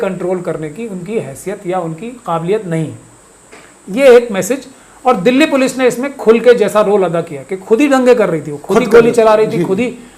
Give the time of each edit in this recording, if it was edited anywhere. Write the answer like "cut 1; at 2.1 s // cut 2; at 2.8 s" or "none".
none

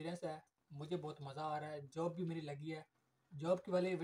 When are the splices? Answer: none

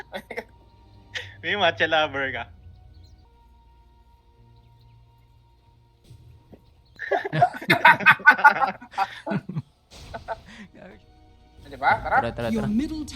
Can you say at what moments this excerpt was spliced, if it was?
cut 1; at 10.8 s

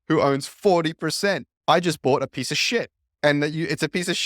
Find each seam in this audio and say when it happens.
cut 1; at 1.5 s // cut 2; at 3.0 s

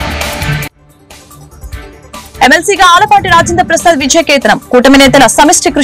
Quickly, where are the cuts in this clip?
cut 1; at 2.3 s

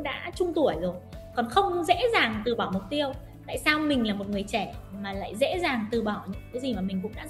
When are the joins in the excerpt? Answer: none

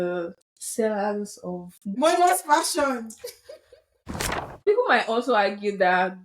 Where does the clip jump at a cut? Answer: cut 1; at 1.9 s // cut 2; at 4.0 s

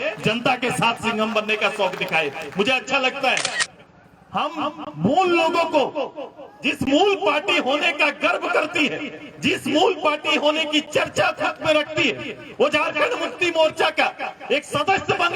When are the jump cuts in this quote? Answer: cut 1; at 3.6 s

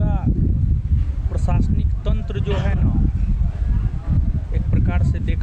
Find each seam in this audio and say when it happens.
none

